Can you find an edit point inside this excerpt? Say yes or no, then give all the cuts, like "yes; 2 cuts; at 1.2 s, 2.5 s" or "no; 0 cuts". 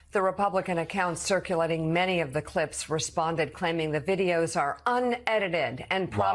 no; 0 cuts